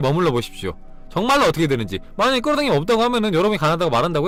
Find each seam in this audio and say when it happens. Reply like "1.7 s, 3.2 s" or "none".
none